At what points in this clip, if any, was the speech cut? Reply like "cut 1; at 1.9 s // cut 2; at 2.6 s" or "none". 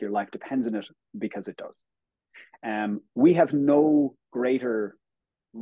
none